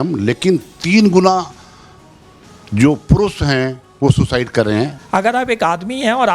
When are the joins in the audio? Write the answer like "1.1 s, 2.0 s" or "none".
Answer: 5.0 s